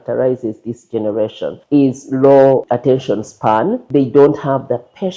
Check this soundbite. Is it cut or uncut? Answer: cut